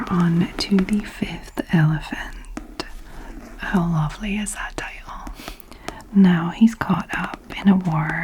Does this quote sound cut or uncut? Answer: cut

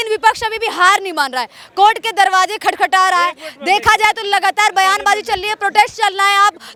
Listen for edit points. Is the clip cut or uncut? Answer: uncut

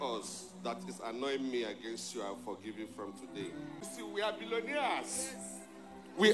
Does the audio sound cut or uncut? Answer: cut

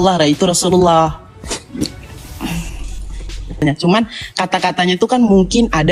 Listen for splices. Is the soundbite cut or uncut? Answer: cut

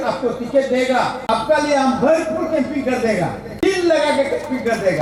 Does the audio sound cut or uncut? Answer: uncut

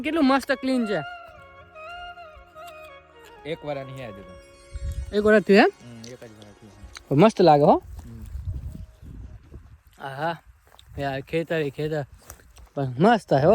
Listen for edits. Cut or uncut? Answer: uncut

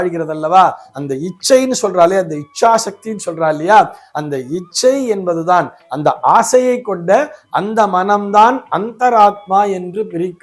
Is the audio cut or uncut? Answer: uncut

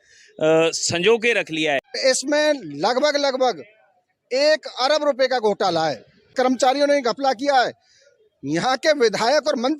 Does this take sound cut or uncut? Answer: cut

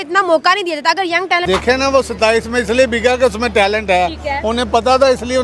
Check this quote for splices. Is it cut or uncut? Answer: cut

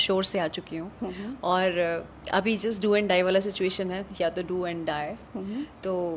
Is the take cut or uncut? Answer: uncut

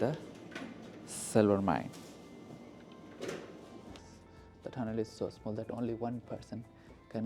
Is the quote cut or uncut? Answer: cut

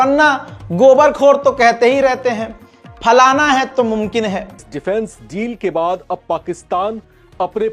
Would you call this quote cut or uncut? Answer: cut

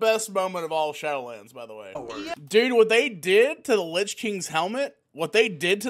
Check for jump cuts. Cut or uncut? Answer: cut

